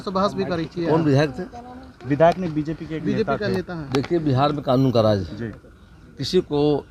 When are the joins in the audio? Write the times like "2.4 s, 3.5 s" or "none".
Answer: none